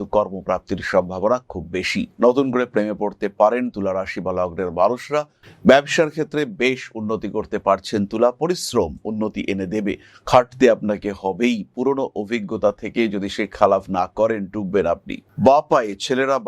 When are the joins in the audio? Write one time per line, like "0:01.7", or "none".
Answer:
0:02.1
0:05.4
0:15.1

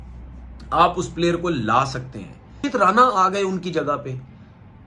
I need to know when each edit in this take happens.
0:02.6

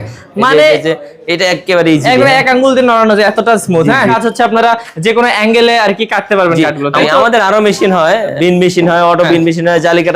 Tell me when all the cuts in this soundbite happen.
0:04.1
0:07.0
0:08.3

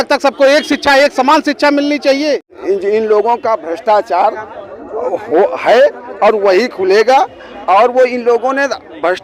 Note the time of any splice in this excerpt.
0:02.5

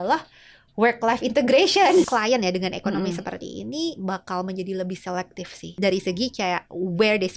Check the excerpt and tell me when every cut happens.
0:02.1
0:05.8

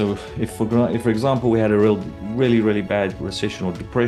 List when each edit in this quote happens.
none

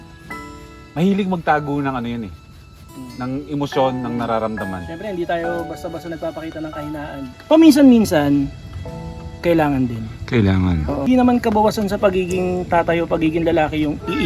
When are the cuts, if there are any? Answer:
0:07.3
0:11.1

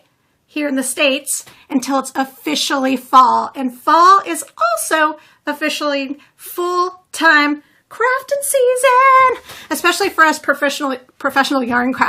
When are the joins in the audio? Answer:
0:10.0

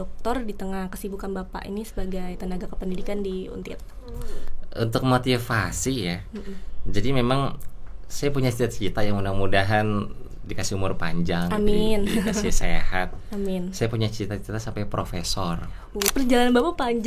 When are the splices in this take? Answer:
0:16.1

